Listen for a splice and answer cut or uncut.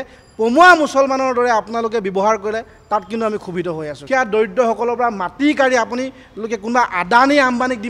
cut